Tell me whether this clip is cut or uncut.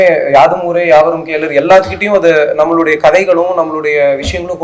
uncut